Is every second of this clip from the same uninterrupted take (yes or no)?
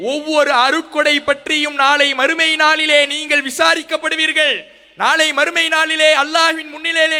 yes